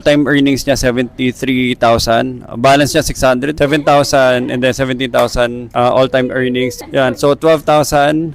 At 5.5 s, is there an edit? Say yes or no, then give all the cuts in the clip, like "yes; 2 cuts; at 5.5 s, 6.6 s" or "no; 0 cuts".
no; 2 cuts; at 3.5 s, 6.7 s